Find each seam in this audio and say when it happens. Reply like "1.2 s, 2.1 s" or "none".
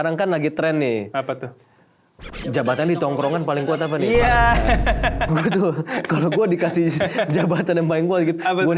none